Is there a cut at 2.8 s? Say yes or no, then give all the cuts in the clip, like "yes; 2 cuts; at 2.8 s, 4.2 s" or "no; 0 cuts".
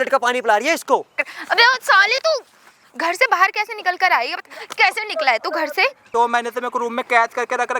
no; 2 cuts; at 1.2 s, 6.0 s